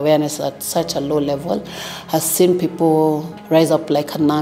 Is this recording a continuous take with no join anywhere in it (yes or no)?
yes